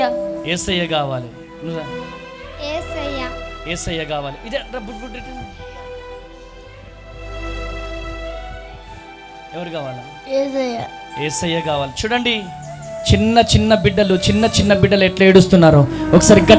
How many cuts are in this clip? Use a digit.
0